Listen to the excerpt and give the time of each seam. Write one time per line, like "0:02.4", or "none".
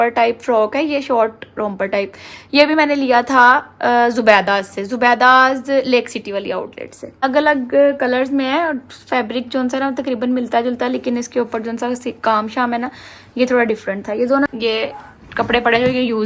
0:07.2
0:14.5